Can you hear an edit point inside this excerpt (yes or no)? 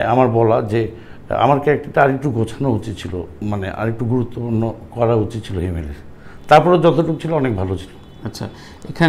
no